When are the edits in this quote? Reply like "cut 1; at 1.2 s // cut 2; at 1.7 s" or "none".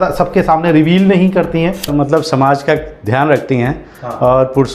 cut 1; at 1.9 s